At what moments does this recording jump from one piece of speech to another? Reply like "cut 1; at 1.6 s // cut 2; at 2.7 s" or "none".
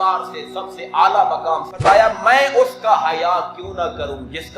cut 1; at 1.7 s